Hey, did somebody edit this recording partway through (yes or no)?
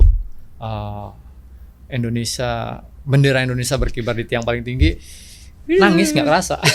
no